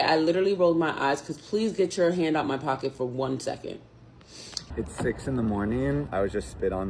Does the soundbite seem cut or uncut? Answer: cut